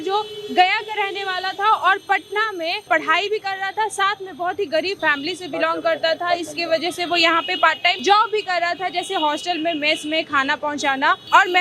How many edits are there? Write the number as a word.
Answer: zero